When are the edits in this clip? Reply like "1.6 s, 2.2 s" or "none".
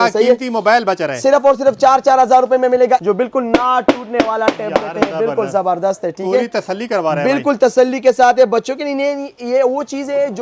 3.0 s